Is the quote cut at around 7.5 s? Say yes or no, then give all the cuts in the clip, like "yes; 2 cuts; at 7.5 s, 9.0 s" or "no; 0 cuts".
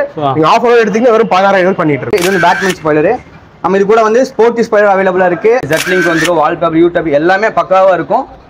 no; 2 cuts; at 2.1 s, 5.7 s